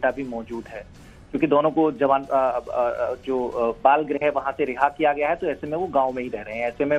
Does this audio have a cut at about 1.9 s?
yes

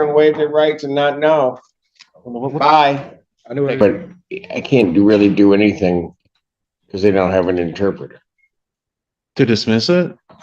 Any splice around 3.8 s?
yes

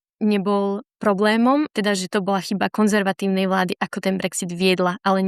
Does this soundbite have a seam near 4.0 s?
no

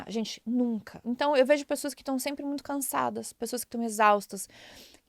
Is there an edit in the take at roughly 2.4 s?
no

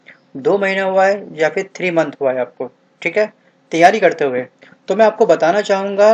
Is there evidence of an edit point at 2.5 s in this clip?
no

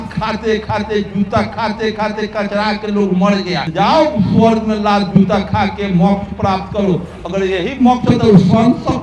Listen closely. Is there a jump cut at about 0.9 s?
no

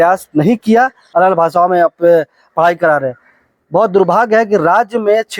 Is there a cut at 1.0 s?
yes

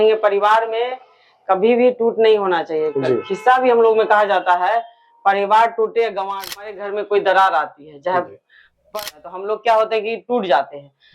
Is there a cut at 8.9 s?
yes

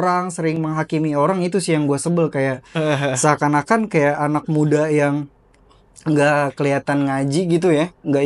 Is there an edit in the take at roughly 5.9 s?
no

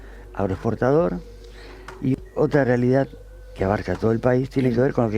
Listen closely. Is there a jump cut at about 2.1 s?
yes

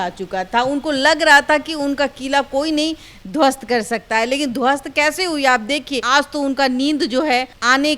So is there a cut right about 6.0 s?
yes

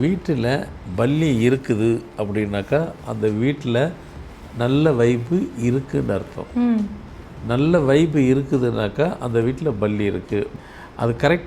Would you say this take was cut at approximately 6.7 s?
no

